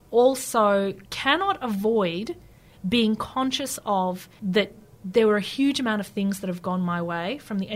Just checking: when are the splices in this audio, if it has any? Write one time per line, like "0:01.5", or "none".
0:01.1
0:04.3